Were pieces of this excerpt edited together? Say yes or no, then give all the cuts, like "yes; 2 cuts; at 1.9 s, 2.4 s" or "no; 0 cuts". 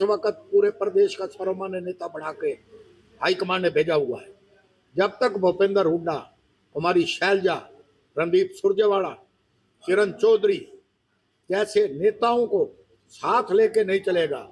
no; 0 cuts